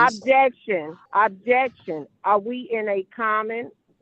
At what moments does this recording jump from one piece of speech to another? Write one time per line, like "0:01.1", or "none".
0:01.0